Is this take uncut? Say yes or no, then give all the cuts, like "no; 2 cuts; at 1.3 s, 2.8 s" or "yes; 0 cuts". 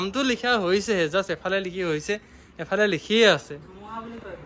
yes; 0 cuts